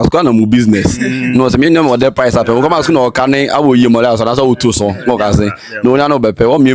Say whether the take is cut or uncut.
uncut